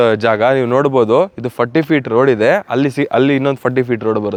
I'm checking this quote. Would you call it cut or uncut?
uncut